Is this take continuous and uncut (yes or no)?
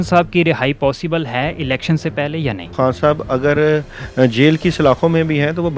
no